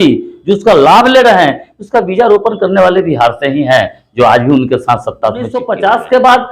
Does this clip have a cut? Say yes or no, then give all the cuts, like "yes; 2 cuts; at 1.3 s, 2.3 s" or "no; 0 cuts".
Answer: yes; 1 cut; at 5.6 s